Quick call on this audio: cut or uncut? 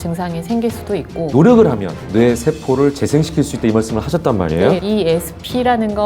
cut